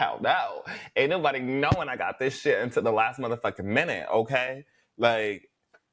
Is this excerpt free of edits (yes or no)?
yes